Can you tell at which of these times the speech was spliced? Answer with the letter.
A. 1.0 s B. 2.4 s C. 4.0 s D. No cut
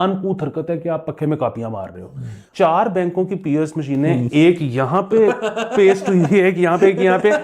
B